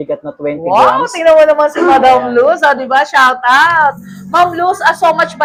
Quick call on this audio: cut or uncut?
uncut